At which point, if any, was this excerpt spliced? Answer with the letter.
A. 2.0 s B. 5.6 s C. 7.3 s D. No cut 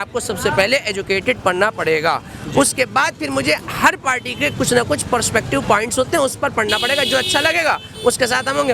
D